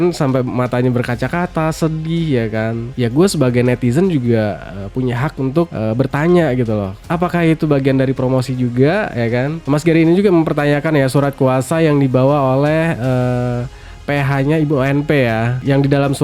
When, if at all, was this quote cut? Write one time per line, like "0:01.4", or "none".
0:09.6